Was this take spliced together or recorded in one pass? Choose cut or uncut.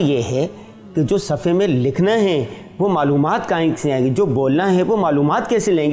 uncut